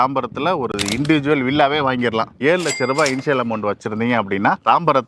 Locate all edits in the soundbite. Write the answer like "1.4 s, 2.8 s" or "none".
2.3 s